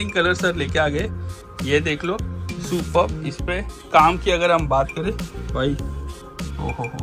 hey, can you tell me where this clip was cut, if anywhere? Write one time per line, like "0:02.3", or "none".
none